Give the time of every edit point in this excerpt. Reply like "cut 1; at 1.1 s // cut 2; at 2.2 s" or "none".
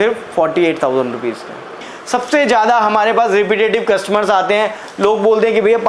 cut 1; at 1.9 s